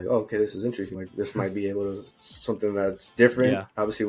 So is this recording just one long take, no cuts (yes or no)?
no